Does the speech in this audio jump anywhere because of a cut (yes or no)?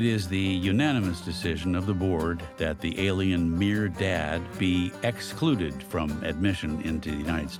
no